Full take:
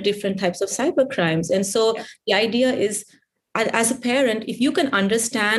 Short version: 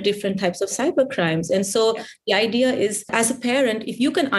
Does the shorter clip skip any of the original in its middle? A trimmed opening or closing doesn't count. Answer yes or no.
yes